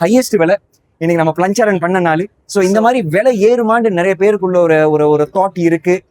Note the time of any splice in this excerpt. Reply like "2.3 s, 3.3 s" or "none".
2.4 s